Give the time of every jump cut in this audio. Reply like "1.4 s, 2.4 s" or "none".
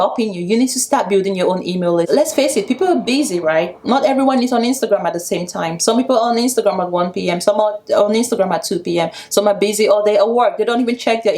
2.1 s